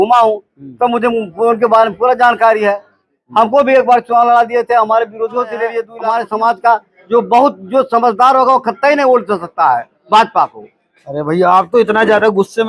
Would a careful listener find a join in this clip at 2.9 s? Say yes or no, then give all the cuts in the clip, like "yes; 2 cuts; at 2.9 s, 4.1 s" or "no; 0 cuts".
no; 1 cut; at 5.9 s